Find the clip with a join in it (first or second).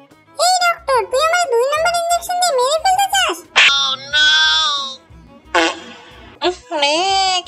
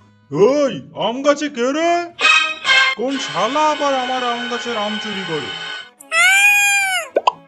first